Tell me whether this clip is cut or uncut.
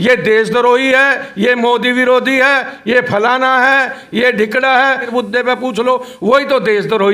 cut